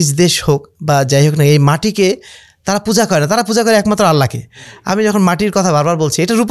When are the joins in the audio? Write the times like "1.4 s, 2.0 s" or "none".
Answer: none